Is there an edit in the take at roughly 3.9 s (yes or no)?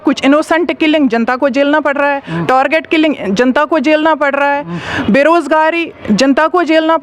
no